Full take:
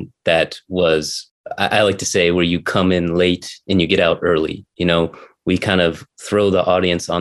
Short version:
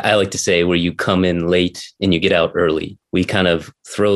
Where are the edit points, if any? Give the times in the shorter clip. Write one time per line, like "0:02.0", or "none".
0:03.0